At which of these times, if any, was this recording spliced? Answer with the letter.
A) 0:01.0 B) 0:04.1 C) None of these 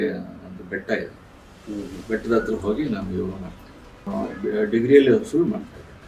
B